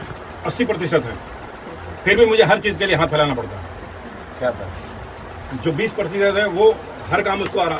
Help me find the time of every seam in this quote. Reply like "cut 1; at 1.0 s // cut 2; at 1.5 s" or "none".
none

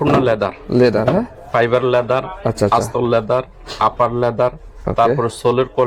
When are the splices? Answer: none

